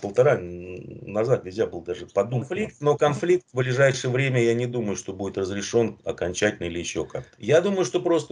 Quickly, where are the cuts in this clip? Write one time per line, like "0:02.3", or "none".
0:02.6
0:07.3